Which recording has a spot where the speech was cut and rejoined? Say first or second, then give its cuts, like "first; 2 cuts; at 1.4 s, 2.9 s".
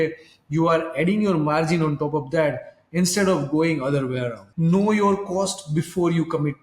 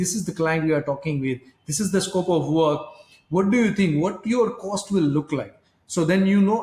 first; 1 cut; at 4.4 s